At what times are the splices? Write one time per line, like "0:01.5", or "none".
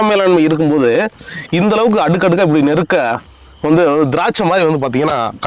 none